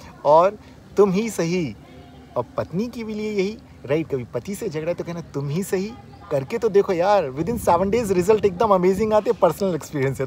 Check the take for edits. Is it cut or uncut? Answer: uncut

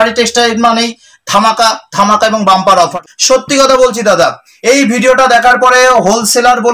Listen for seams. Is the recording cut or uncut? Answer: cut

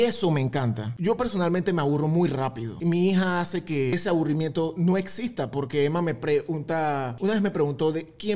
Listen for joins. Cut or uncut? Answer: cut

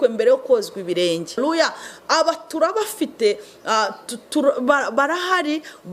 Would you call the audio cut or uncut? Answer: cut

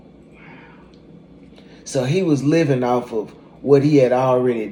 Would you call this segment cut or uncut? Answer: uncut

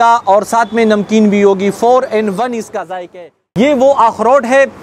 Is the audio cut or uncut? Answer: cut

